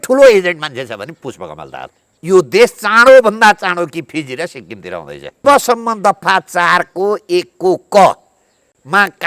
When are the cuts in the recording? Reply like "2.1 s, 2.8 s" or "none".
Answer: 2.0 s, 5.4 s